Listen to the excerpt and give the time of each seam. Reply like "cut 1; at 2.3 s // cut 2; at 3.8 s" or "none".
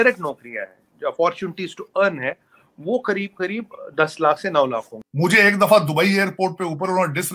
cut 1; at 5.0 s

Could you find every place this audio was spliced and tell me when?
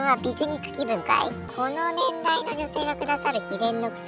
cut 1; at 1.5 s

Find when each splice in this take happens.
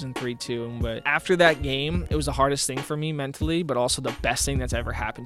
cut 1; at 1.1 s // cut 2; at 2.1 s

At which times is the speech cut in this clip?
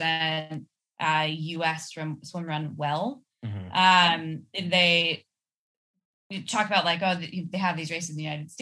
none

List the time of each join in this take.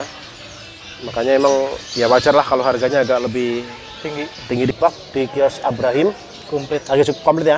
cut 1; at 4.7 s

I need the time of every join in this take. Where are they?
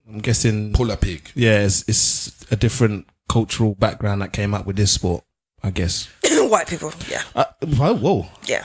none

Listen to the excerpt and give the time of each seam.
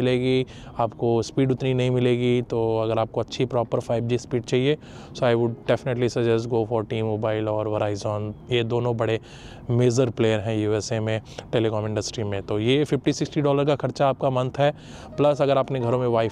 none

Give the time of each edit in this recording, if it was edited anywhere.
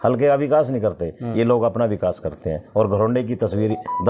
none

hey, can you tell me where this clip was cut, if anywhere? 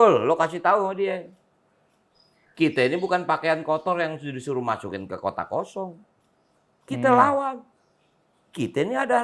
none

